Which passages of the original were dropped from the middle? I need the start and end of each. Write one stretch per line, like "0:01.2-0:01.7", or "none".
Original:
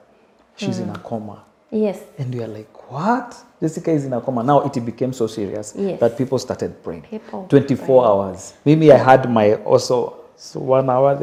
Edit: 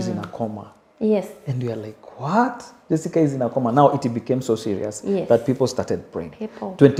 none